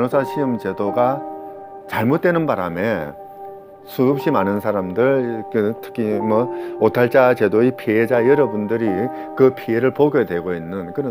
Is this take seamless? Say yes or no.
yes